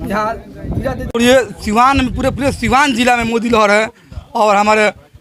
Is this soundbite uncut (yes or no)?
yes